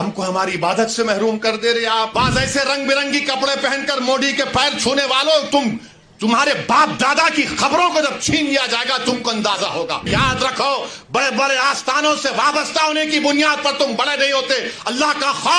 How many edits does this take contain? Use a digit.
2